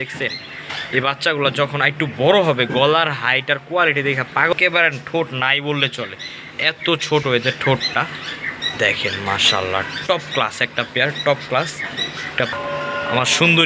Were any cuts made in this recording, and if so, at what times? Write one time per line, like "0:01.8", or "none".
0:04.5
0:12.6